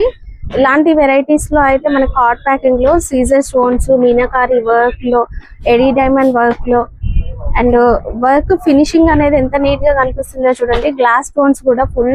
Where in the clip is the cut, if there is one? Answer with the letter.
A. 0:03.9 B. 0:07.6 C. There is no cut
C